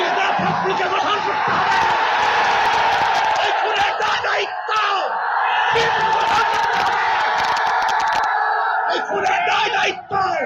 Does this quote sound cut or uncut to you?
uncut